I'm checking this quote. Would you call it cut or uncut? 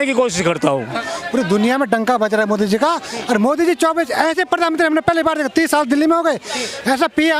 cut